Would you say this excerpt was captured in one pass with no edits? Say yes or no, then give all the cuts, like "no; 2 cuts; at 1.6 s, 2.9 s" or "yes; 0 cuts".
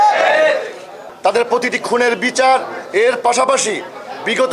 no; 1 cut; at 1.0 s